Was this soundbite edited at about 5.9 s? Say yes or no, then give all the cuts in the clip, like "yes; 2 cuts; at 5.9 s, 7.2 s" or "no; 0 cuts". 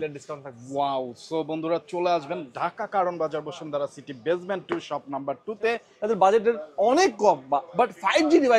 yes; 1 cut; at 5.9 s